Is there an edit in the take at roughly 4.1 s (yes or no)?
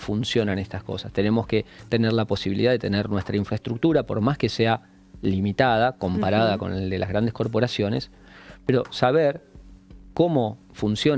no